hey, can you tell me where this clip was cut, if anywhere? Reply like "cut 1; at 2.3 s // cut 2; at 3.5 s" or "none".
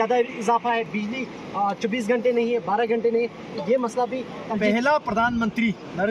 cut 1; at 3.6 s // cut 2; at 4.6 s